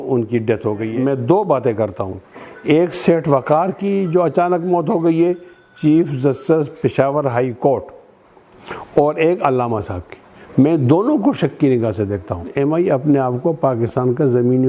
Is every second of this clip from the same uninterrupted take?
no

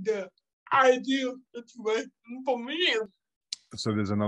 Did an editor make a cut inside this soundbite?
yes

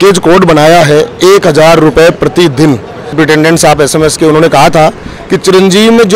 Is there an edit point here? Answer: yes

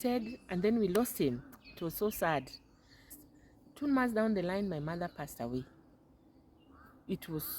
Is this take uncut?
no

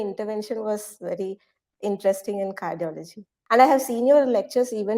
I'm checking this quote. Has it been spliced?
yes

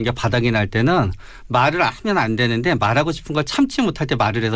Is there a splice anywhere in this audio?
no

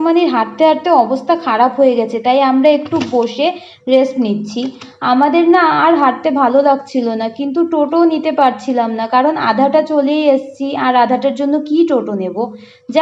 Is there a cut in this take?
no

